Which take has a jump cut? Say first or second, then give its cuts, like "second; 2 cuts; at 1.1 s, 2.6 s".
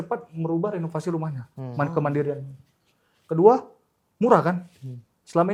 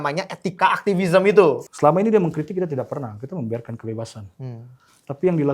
second; 1 cut; at 1.6 s